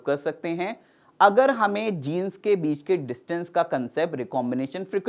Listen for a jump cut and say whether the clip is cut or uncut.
uncut